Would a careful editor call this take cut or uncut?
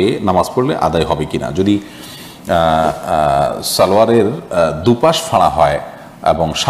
uncut